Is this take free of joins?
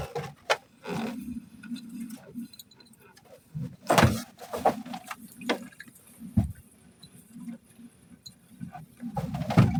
yes; 0 cuts

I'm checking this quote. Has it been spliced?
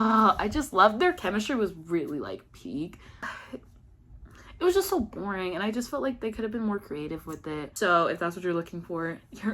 yes; 2 cuts; at 3.2 s, 7.7 s

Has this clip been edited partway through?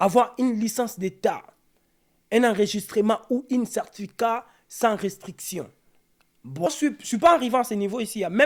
yes; 1 cut; at 6.7 s

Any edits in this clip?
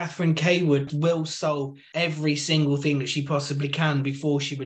yes; 2 cuts; at 0.9 s, 1.8 s

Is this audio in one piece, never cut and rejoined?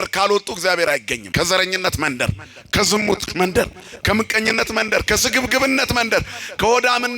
no; 1 cut; at 1.2 s

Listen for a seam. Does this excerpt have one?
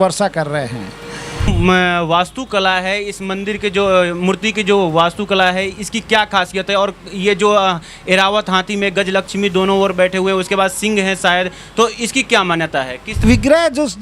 yes; 2 cuts; at 1.5 s, 13.2 s

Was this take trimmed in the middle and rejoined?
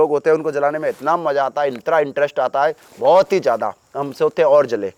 no; 0 cuts

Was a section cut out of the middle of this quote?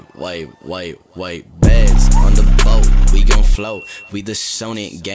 no; 0 cuts

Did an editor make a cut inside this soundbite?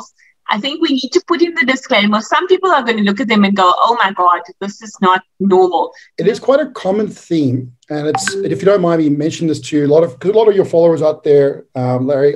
yes; 1 cut; at 6.0 s

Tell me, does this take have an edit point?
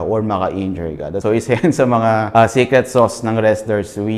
yes; 2 cuts; at 1.2 s, 2.3 s

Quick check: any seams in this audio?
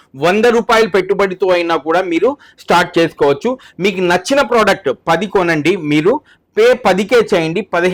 no; 0 cuts

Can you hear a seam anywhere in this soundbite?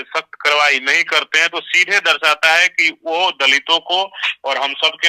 no; 0 cuts

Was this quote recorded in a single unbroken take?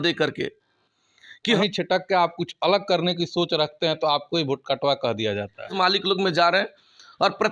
no; 2 cuts; at 1.6 s, 5.7 s

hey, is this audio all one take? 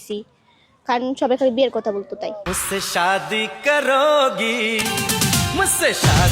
yes; 0 cuts

